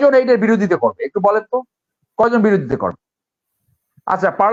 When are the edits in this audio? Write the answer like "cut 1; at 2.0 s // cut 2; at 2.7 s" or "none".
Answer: none

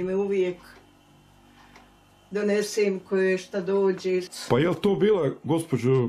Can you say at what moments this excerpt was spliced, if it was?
cut 1; at 4.3 s

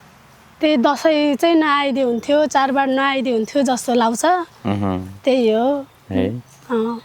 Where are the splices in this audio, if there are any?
none

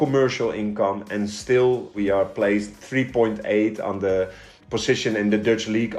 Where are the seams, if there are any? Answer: cut 1; at 1.9 s

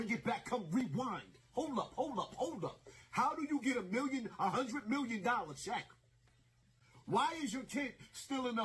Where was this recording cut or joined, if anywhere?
cut 1; at 2.5 s

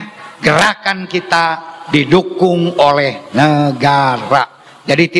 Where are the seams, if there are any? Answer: none

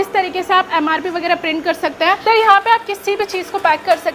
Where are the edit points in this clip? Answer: cut 1; at 2.2 s

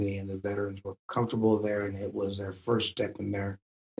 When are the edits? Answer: none

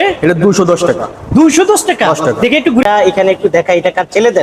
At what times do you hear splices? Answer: cut 1; at 2.8 s

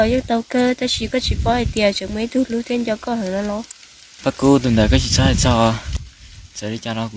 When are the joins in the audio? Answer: none

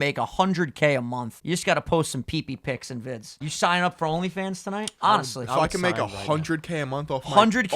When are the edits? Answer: cut 1; at 1.3 s // cut 2; at 3.4 s // cut 3; at 4.9 s

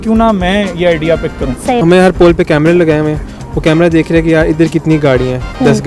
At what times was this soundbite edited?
cut 1; at 1.8 s

